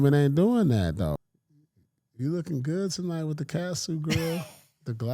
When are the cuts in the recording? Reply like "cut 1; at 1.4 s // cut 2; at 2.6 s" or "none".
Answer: cut 1; at 1.2 s